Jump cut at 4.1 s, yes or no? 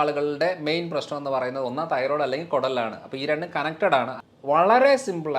yes